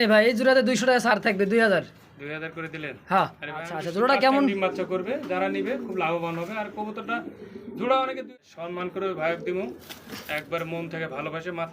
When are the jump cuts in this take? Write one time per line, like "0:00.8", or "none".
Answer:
0:03.8
0:08.2